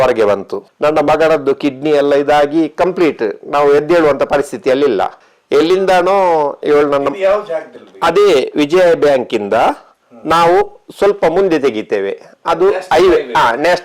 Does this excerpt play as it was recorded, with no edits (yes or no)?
yes